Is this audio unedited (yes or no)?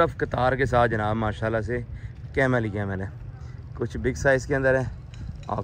yes